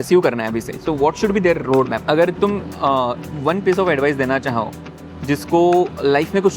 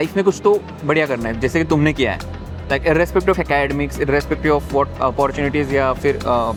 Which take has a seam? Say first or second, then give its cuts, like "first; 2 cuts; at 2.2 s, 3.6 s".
first; 1 cut; at 2.0 s